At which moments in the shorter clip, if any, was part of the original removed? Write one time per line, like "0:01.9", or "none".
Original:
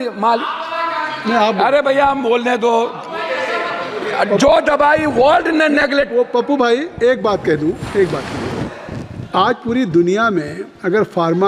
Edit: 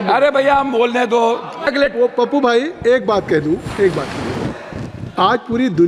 0:01.7